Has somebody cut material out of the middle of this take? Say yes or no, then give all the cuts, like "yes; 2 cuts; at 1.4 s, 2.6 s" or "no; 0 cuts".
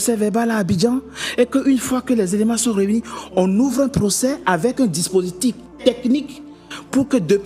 no; 0 cuts